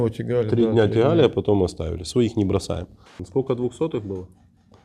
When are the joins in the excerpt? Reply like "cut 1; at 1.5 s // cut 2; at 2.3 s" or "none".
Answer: cut 1; at 3.2 s